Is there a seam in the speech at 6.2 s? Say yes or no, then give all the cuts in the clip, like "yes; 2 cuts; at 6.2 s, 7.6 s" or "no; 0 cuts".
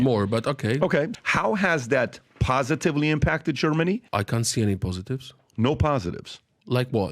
no; 2 cuts; at 1.1 s, 4.1 s